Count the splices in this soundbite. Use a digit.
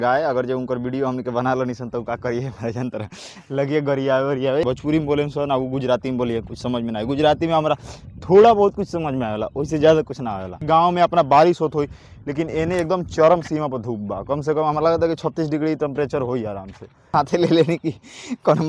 3